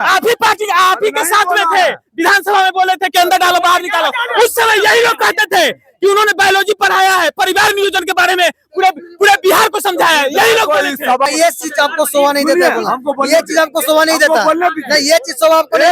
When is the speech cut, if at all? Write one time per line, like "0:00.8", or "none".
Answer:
0:11.3